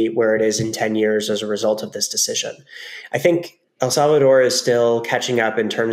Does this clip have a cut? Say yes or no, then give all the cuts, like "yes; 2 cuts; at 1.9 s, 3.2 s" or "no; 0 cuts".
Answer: yes; 1 cut; at 3.9 s